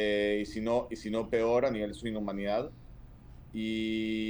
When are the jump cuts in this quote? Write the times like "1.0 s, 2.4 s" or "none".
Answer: none